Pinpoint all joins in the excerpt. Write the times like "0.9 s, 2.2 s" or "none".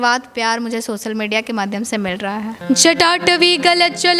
2.6 s